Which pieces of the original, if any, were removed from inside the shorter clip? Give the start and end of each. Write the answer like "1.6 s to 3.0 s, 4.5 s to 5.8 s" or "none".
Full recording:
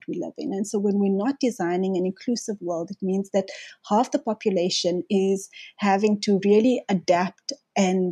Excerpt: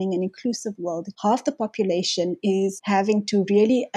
2.9 s to 3.7 s, 5.5 s to 5.7 s